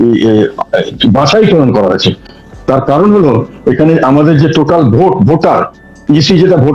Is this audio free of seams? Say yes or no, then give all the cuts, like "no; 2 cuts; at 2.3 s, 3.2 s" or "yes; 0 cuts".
yes; 0 cuts